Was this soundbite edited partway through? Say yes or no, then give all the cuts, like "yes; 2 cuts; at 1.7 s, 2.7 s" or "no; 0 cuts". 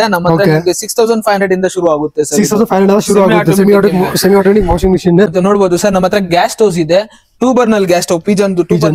yes; 1 cut; at 5.3 s